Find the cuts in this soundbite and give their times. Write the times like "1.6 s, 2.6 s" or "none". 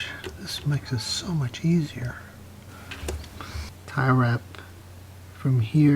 3.5 s